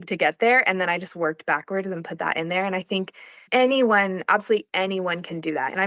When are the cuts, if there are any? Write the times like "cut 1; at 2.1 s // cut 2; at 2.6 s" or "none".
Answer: none